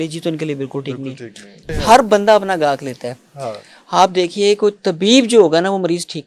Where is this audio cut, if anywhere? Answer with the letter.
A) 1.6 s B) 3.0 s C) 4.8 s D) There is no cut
A